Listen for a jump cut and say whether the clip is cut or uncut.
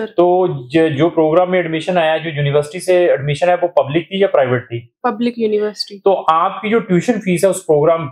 uncut